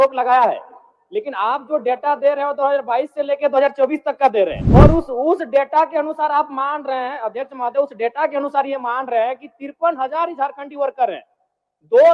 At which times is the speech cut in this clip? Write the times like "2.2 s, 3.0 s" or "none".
4.6 s

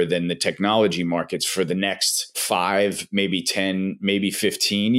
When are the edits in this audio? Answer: 2.4 s

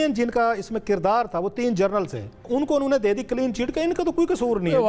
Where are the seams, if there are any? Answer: 2.4 s

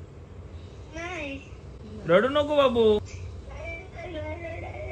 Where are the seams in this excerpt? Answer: 3.0 s

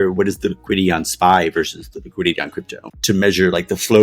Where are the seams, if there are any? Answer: 2.9 s

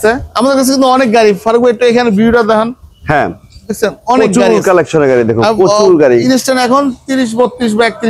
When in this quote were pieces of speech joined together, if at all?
none

